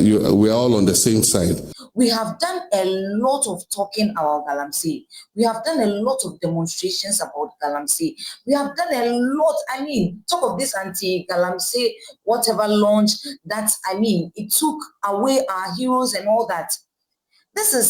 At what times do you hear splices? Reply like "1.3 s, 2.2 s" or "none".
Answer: 1.7 s